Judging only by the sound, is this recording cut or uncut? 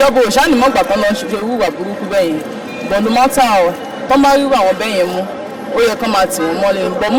uncut